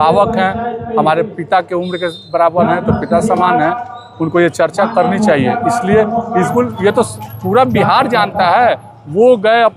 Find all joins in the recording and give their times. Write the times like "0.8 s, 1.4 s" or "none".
6.5 s